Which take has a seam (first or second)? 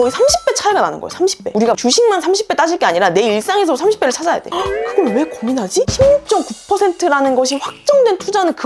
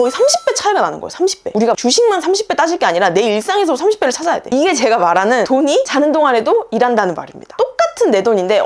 first